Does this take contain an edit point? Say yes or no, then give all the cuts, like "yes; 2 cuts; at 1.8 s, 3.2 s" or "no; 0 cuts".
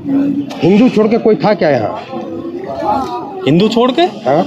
no; 0 cuts